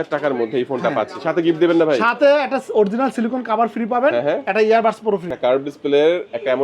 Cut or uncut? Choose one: cut